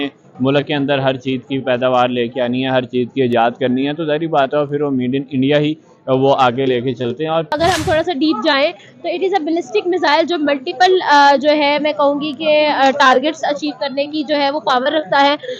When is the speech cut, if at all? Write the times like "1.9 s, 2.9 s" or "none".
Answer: 7.5 s